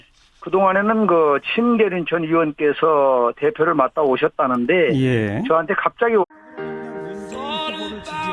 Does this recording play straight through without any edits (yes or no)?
yes